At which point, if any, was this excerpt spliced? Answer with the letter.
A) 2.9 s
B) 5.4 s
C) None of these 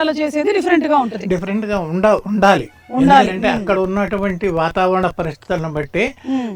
C